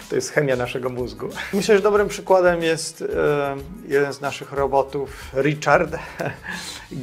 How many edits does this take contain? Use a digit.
1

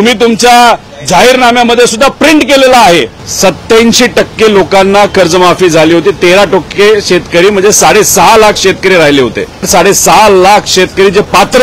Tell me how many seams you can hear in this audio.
2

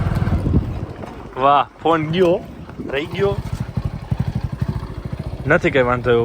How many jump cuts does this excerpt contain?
1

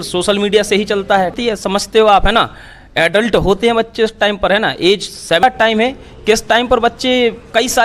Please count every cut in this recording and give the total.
2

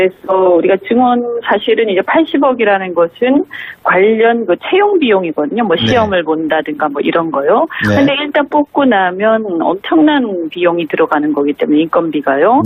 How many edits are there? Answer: 0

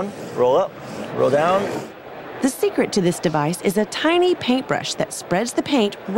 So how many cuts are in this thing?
1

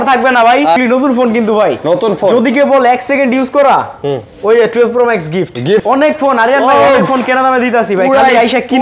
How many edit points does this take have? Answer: 2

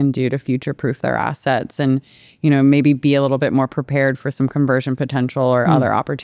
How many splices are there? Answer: 0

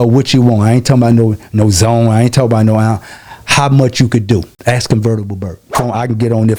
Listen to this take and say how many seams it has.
2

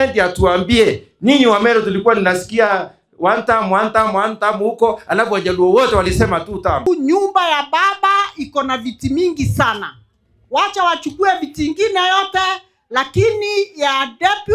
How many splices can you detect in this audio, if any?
1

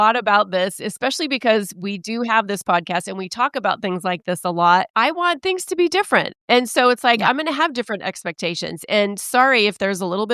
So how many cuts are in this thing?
1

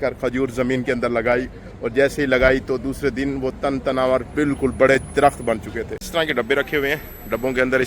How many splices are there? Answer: 1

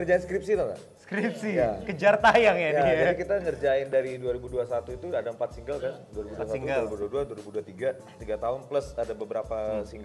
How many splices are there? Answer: 0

